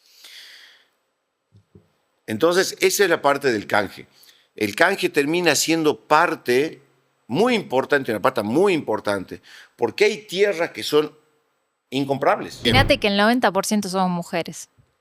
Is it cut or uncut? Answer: cut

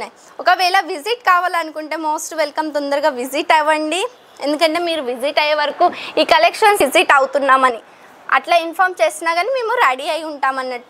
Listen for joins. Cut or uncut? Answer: cut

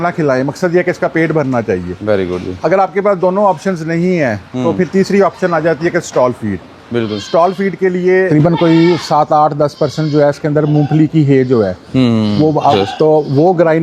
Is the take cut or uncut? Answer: cut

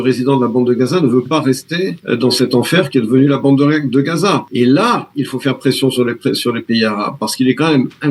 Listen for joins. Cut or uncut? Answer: cut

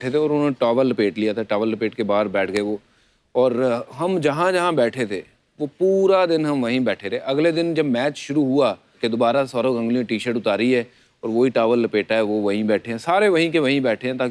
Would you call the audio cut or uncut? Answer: uncut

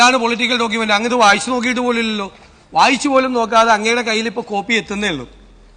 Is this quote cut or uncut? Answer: uncut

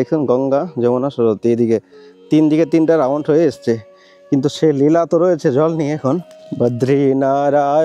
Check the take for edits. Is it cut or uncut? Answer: cut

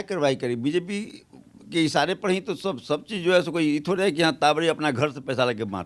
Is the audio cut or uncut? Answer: uncut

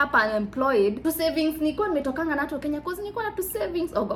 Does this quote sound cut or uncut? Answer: uncut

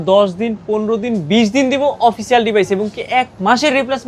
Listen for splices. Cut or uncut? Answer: uncut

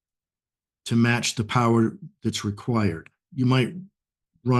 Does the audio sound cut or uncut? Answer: cut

